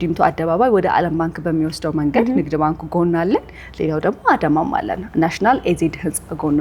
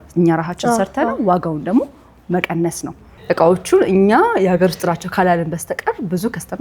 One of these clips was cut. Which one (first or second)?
second